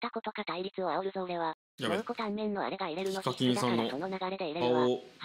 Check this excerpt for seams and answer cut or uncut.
uncut